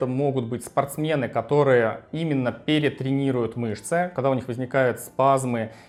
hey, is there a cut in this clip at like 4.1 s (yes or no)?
no